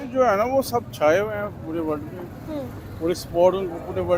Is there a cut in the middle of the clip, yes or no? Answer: no